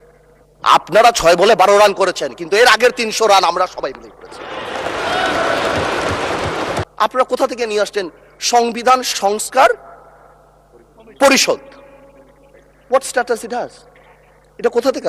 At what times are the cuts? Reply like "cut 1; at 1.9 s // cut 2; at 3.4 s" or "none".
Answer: cut 1; at 6.8 s

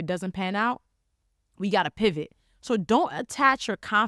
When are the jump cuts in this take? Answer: none

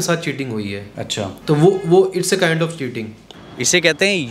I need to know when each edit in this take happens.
cut 1; at 3.2 s

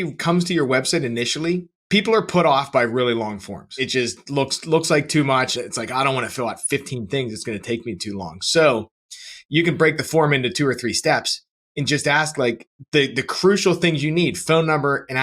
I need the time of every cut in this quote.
cut 1; at 1.7 s // cut 2; at 3.8 s // cut 3; at 5.5 s

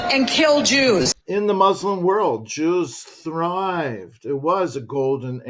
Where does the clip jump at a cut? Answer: cut 1; at 1.2 s

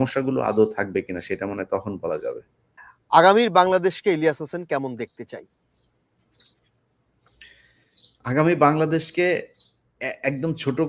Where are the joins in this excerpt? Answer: cut 1; at 3.0 s

